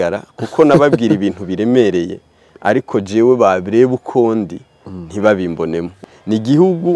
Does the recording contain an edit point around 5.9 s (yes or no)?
yes